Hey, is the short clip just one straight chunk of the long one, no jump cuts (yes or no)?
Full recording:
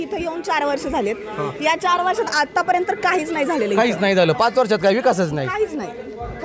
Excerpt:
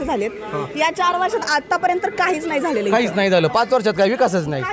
yes